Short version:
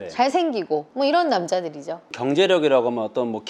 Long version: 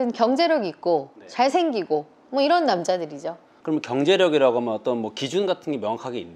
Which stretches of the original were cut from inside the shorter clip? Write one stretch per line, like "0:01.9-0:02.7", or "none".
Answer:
0:02.1-0:02.2
0:03.5-0:03.9